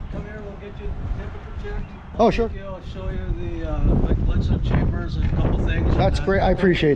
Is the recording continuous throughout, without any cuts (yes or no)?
yes